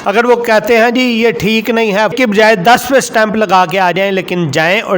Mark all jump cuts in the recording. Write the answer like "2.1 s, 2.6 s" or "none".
2.1 s